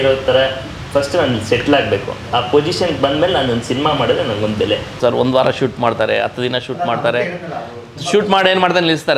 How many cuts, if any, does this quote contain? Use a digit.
1